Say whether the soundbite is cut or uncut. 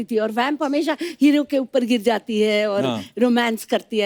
uncut